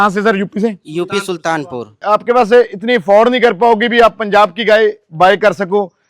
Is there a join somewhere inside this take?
yes; 1 cut; at 1.9 s

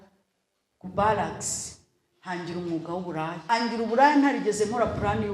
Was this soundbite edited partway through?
yes; 1 cut; at 3.4 s

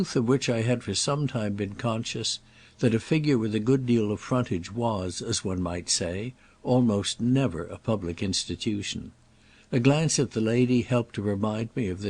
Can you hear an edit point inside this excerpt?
yes; 1 cut; at 10.6 s

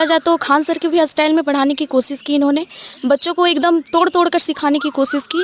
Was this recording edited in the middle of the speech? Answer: no; 0 cuts

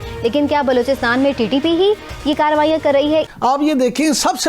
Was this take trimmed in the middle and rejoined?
yes; 1 cut; at 3.3 s

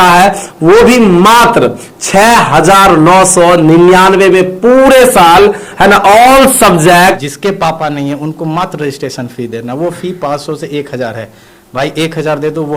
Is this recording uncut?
no; 1 cut; at 7.2 s

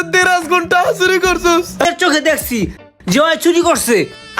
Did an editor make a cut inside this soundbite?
yes; 1 cut; at 1.8 s

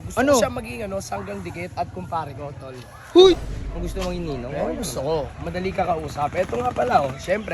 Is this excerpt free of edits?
no; 1 cut; at 3.4 s

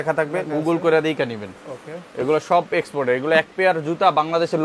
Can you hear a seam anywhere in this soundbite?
no; 0 cuts

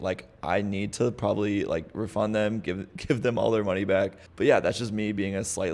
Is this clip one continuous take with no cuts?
no; 1 cut; at 4.2 s

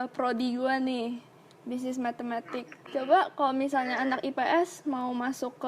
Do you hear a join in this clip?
yes; 1 cut; at 2.4 s

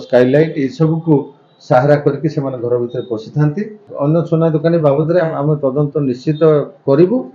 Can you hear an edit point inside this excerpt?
yes; 1 cut; at 3.9 s

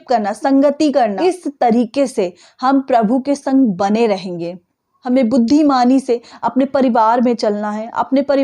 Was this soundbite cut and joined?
yes; 2 cuts; at 1.2 s, 4.7 s

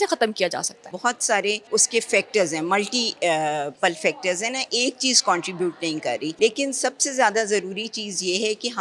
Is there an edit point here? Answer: yes; 4 cuts; at 0.9 s, 1.6 s, 3.7 s, 6.3 s

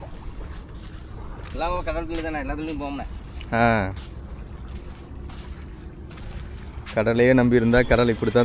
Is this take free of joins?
yes; 0 cuts

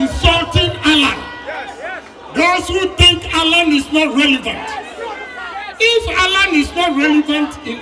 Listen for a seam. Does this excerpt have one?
no; 0 cuts

